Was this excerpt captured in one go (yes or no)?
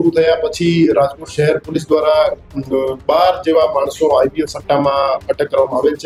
yes